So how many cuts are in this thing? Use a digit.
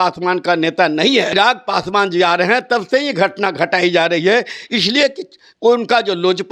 1